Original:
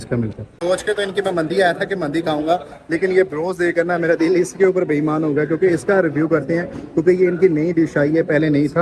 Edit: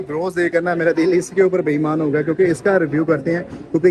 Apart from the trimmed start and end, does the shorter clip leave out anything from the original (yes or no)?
no